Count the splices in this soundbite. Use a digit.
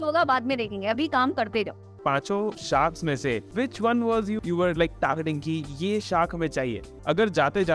4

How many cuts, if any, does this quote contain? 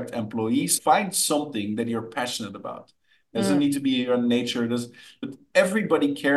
1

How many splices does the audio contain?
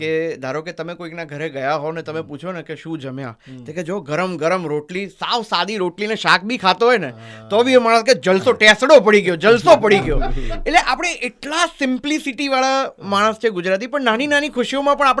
0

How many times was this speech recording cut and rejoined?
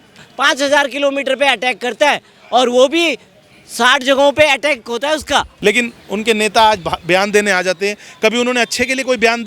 1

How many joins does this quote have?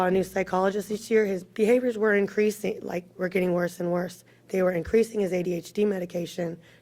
0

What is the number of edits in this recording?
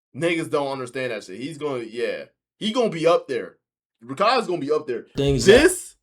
1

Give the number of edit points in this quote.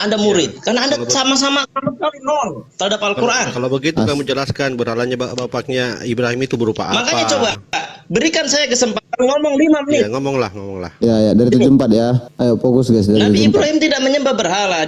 1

